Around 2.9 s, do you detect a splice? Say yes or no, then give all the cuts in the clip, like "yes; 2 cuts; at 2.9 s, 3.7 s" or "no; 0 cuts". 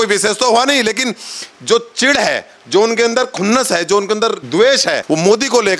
no; 2 cuts; at 4.4 s, 5.0 s